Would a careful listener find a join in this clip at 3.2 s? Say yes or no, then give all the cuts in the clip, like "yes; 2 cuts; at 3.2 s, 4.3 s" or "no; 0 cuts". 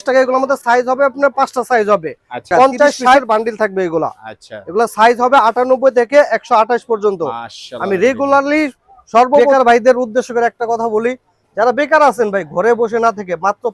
yes; 2 cuts; at 3.2 s, 9.4 s